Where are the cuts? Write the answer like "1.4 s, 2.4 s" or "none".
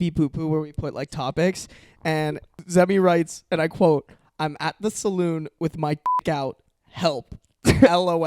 2.5 s